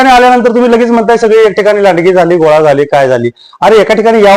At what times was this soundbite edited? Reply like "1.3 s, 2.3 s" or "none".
none